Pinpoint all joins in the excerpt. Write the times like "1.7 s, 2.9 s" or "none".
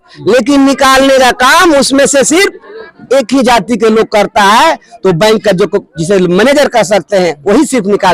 none